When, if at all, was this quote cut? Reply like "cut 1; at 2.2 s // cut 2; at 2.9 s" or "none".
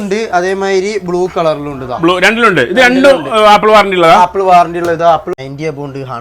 cut 1; at 5.3 s